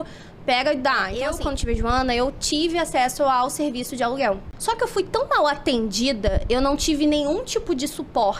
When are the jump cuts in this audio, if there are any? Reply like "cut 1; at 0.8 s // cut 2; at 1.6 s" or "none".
cut 1; at 1.4 s // cut 2; at 4.5 s